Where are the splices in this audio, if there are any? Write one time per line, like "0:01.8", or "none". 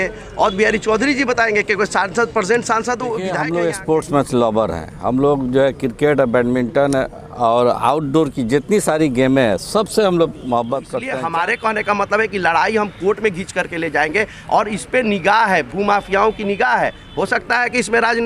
0:03.4
0:11.0